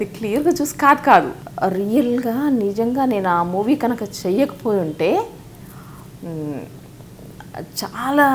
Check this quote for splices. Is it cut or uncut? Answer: cut